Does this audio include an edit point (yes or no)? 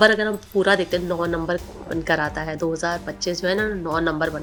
no